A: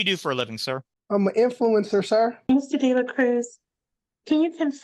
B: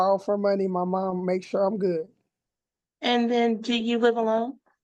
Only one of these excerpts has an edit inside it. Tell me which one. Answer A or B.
A